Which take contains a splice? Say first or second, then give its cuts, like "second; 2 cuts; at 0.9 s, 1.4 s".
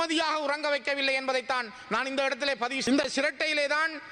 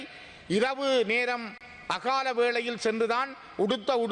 first; 1 cut; at 2.8 s